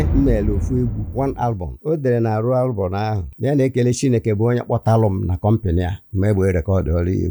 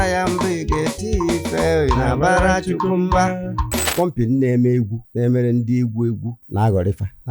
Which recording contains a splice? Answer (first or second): second